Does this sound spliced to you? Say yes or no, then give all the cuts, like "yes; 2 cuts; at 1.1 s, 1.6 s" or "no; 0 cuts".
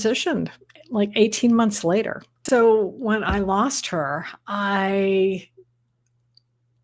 yes; 1 cut; at 2.3 s